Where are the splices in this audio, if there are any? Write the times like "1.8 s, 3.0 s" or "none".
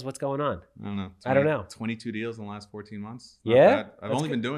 none